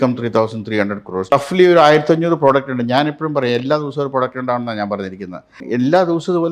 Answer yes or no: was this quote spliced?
yes